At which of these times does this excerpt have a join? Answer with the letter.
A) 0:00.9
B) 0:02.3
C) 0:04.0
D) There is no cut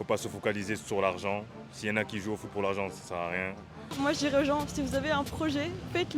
C